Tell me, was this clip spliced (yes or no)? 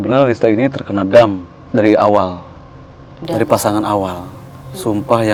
no